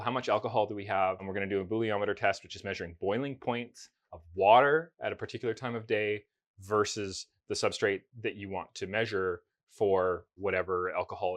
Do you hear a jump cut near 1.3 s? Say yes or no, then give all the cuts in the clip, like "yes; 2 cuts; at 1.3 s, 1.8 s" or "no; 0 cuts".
yes; 2 cuts; at 1.3 s, 10.3 s